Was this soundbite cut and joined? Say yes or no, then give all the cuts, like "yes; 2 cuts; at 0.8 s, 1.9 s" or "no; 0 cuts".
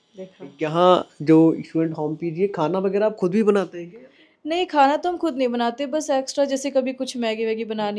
no; 0 cuts